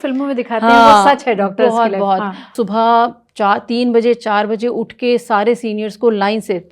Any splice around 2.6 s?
yes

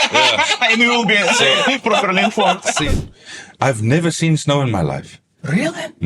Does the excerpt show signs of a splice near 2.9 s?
yes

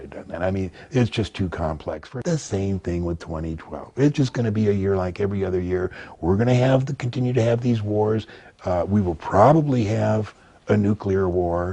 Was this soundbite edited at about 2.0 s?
yes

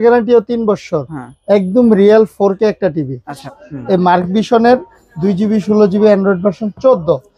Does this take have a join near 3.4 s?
yes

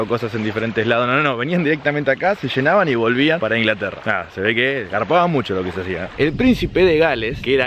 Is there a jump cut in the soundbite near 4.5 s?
no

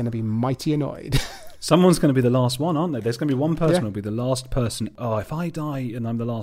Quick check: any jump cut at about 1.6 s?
no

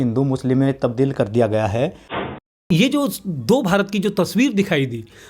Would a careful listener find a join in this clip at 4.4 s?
no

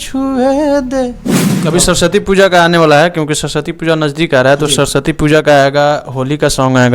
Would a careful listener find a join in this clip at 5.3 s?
no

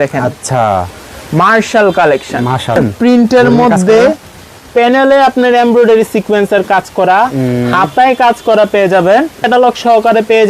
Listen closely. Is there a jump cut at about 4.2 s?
no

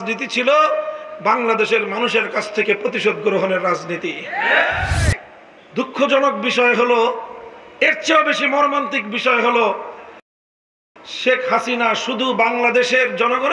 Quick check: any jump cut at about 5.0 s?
yes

